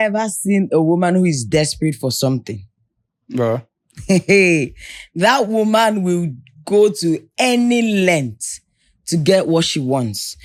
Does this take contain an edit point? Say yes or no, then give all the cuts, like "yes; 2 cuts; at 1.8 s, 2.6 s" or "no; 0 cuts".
no; 0 cuts